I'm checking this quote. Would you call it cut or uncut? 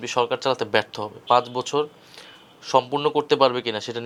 uncut